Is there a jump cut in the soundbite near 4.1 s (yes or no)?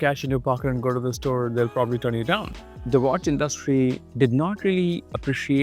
yes